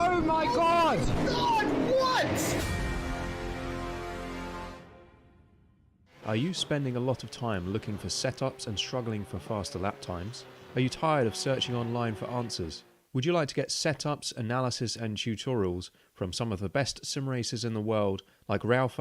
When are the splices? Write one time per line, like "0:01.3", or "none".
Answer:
0:06.2